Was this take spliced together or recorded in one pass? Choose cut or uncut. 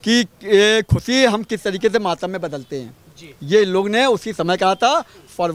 uncut